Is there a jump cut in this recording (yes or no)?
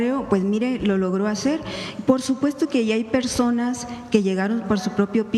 no